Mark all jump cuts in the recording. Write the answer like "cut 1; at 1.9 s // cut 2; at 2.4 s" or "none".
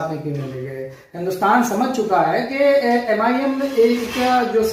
none